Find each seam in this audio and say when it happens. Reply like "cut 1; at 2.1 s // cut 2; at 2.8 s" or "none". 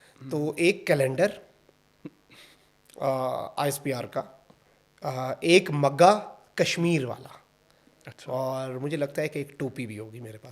none